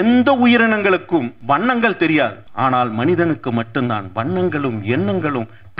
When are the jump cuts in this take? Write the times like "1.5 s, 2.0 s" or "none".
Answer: 1.3 s, 2.4 s